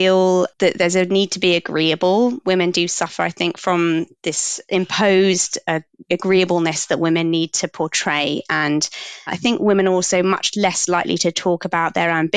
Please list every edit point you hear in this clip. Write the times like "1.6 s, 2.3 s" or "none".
4.5 s, 9.3 s